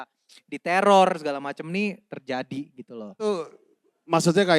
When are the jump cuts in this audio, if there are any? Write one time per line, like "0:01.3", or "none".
0:03.3